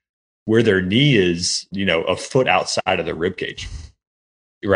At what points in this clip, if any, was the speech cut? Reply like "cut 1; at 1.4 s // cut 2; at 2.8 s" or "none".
cut 1; at 1.7 s // cut 2; at 2.8 s